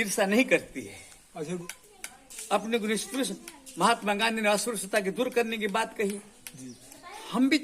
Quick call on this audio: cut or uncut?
cut